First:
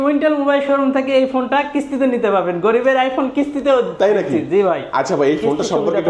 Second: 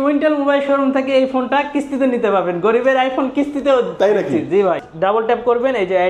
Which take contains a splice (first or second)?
second